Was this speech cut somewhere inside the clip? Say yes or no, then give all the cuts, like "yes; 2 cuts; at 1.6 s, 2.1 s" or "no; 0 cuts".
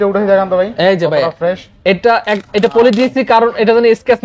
no; 0 cuts